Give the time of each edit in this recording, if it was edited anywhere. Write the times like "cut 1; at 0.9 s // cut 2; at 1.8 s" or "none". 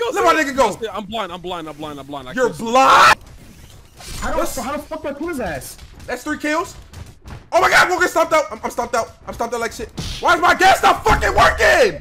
cut 1; at 3.1 s